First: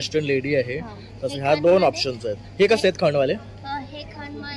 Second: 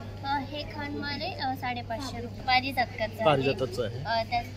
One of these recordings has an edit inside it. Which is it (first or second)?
second